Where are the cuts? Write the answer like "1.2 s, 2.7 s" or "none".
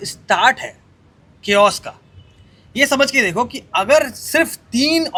none